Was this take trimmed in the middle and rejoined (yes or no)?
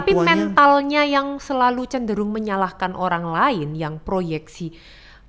no